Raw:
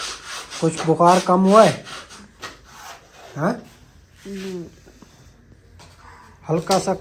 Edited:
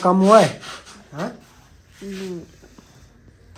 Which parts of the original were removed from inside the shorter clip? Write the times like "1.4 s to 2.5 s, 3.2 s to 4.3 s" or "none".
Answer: 2.2 s to 3.2 s